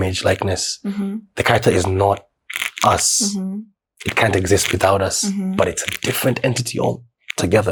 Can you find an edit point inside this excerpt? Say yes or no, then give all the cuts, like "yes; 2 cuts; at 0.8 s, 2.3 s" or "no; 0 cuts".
no; 0 cuts